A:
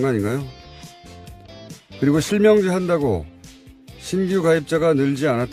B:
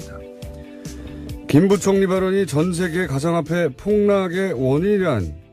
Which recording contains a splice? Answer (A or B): A